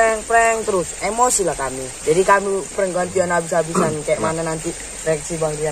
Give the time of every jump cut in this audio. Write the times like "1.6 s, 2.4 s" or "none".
2.0 s